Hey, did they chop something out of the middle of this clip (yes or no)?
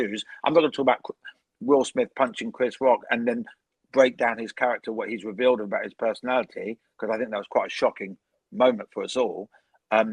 no